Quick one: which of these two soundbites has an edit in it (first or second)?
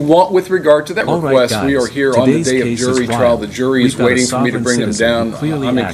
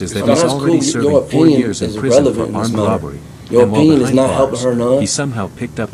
first